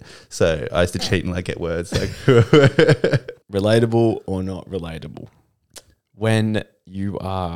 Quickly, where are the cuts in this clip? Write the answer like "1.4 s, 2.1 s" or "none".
3.4 s